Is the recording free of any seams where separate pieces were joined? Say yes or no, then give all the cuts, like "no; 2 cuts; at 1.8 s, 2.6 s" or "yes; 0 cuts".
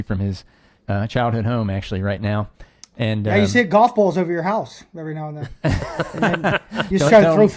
yes; 0 cuts